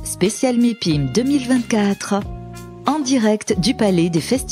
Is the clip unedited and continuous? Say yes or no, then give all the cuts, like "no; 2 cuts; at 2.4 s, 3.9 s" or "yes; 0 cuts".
yes; 0 cuts